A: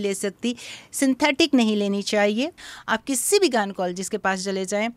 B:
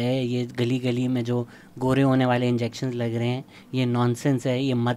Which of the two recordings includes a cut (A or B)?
A